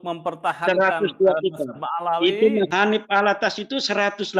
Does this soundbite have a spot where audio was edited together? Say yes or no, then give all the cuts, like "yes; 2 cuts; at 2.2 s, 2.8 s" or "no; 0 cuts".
yes; 1 cut; at 2.7 s